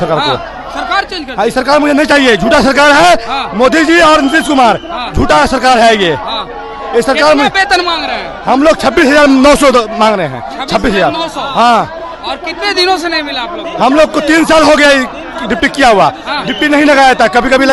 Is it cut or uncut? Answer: uncut